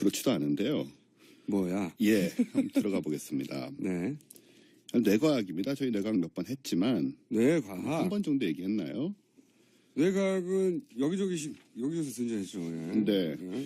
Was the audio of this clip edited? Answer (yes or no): yes